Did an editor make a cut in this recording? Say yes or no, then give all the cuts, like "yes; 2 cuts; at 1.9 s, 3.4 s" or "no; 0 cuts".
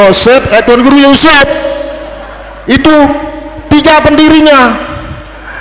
no; 0 cuts